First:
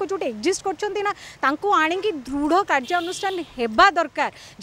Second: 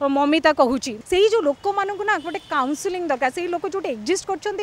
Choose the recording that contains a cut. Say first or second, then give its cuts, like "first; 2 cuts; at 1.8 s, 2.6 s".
second; 1 cut; at 0.9 s